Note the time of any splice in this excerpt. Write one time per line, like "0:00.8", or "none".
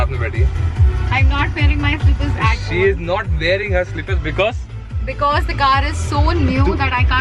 none